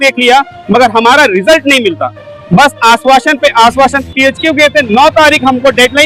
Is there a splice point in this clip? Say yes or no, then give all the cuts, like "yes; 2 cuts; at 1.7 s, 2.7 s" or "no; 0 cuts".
no; 0 cuts